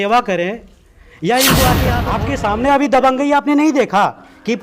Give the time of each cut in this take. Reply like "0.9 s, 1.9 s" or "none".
2.1 s